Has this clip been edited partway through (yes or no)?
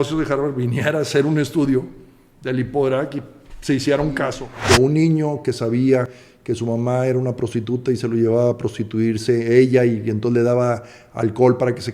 yes